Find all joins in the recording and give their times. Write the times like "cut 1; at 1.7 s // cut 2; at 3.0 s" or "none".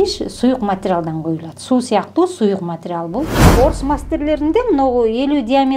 cut 1; at 3.4 s